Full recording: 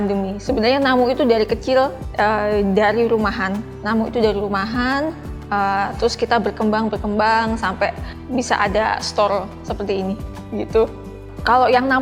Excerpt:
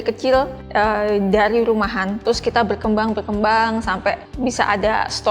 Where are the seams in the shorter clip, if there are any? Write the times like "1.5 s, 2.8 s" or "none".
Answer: 2.2 s, 4.3 s